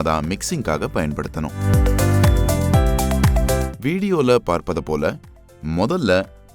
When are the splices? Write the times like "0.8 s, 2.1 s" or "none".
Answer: 1.7 s, 3.8 s